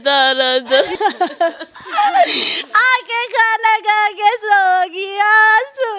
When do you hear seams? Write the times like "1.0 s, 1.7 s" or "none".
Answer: 0.9 s